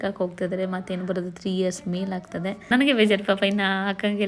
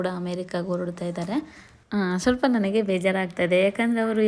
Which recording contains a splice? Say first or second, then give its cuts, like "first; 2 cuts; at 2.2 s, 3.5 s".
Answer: first; 1 cut; at 2.7 s